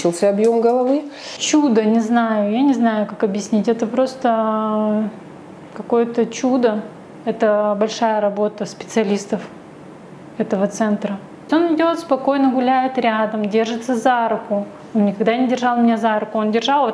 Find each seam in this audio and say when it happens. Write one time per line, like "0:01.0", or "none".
0:01.3
0:11.4